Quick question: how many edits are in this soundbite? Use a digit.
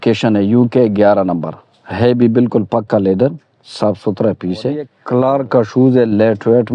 1